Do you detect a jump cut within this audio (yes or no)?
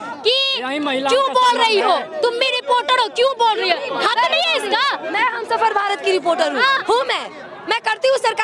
no